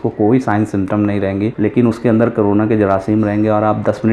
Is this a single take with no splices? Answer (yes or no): no